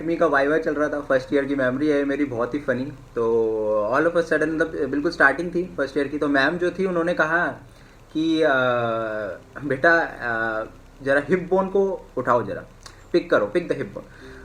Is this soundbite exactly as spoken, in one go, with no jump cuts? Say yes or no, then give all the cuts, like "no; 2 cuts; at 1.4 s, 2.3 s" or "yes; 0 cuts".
yes; 0 cuts